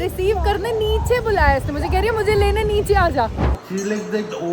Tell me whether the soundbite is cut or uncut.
cut